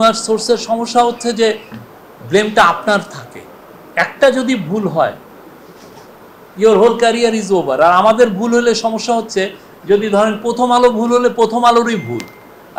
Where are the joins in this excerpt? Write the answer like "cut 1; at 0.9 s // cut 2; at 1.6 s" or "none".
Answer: none

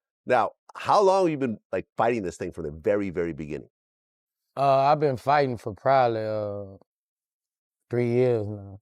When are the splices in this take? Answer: none

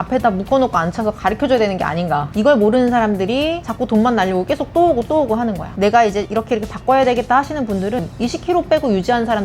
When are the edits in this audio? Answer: cut 1; at 2.3 s // cut 2; at 3.6 s // cut 3; at 5.7 s // cut 4; at 8.0 s

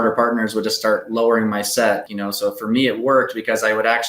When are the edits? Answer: cut 1; at 2.1 s

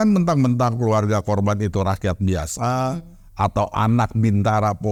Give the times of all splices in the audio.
none

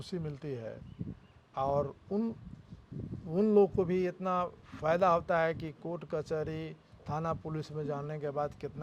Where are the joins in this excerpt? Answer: none

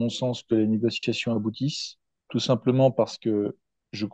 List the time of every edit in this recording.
none

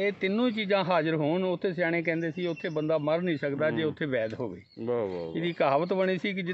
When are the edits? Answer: none

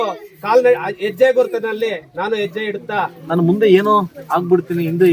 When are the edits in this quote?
cut 1; at 3.2 s

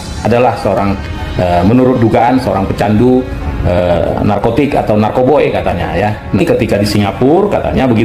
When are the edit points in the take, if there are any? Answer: cut 1; at 6.4 s

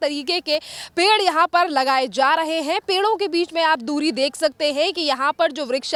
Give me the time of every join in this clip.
none

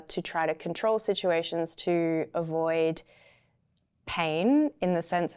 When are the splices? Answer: none

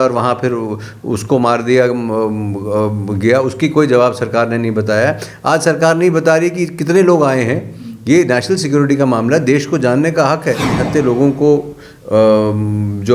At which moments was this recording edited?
cut 1; at 10.7 s

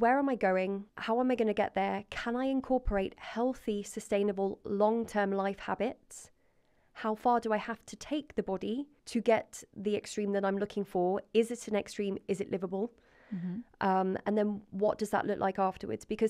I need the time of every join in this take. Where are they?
cut 1; at 0.9 s // cut 2; at 9.0 s

